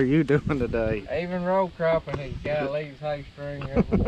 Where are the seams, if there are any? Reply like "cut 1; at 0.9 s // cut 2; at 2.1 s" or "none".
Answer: none